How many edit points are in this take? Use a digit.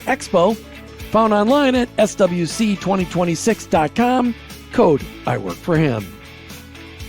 1